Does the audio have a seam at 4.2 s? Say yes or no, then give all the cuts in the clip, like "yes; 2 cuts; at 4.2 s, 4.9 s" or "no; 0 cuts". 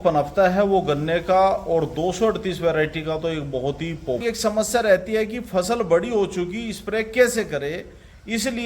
yes; 1 cut; at 4.2 s